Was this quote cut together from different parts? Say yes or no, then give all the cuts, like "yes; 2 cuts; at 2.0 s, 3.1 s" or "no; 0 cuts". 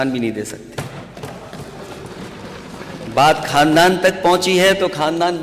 no; 0 cuts